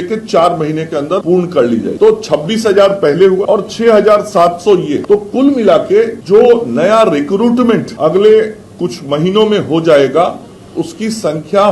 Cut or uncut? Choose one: cut